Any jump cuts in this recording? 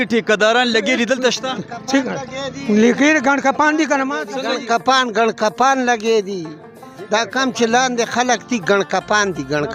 no; 0 cuts

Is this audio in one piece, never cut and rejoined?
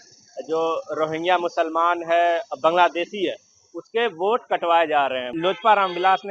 no; 1 cut; at 5.3 s

